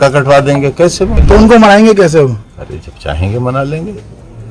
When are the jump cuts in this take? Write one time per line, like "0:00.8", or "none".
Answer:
0:01.2